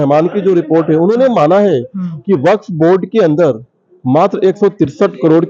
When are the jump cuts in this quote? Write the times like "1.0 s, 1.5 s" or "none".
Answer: none